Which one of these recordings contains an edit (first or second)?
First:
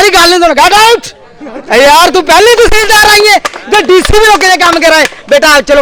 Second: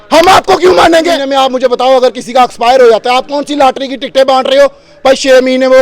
second